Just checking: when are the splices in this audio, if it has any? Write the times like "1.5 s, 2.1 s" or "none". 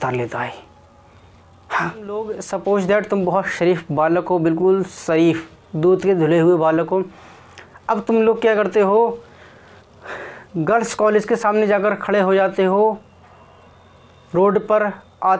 2.4 s